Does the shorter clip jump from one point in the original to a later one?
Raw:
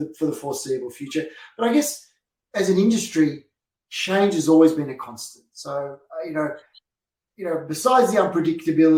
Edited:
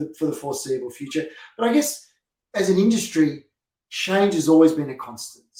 no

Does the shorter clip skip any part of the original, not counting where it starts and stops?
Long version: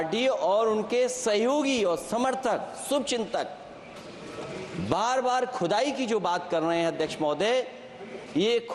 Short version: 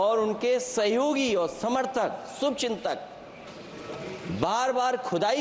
no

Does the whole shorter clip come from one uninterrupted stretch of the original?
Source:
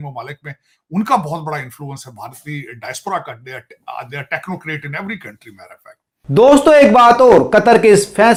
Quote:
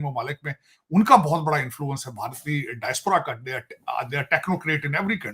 yes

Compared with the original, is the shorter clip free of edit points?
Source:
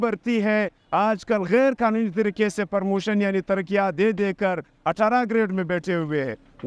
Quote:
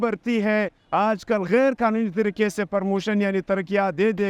yes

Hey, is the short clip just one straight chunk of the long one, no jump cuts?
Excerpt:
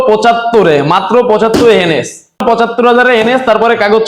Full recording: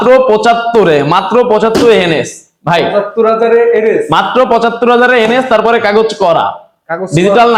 no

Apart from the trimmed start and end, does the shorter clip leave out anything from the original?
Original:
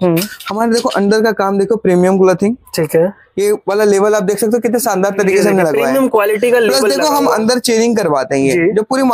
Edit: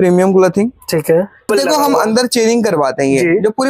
yes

